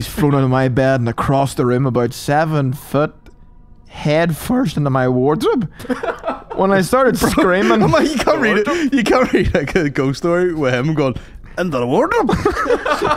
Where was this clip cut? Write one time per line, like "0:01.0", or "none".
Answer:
none